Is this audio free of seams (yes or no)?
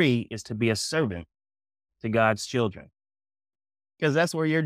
yes